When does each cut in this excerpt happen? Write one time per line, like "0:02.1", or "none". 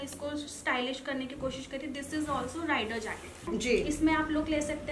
0:03.5